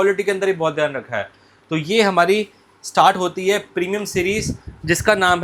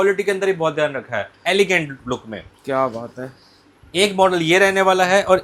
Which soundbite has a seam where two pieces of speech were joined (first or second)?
second